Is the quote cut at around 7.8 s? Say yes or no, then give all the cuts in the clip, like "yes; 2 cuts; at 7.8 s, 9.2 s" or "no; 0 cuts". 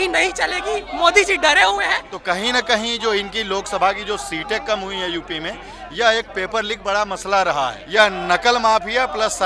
yes; 2 cuts; at 2.1 s, 7.8 s